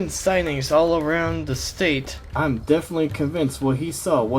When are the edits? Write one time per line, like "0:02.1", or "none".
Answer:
0:02.2